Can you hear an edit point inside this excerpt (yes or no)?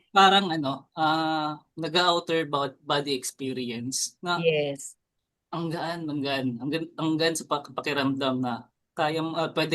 yes